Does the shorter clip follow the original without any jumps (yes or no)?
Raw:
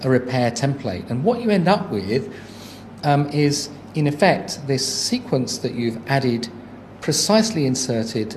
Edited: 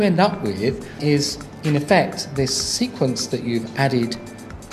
no